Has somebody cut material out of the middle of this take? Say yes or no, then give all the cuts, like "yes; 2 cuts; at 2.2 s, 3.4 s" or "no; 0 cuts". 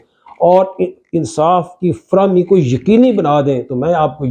no; 0 cuts